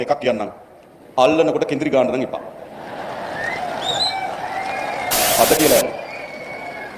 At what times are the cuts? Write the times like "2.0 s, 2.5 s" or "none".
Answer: 5.1 s

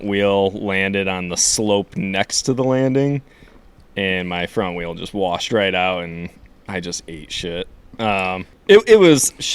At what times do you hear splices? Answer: 8.5 s

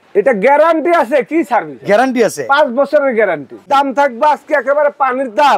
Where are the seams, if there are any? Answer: 3.7 s

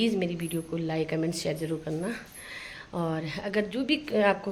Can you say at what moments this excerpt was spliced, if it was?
none

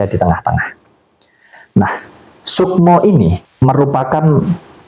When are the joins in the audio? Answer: 3.5 s

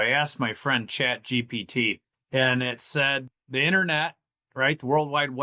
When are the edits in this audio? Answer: 2.2 s, 3.3 s

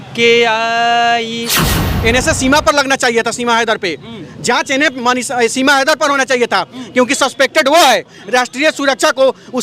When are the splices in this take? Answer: 1.7 s, 8.2 s

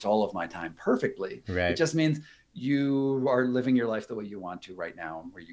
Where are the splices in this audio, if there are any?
none

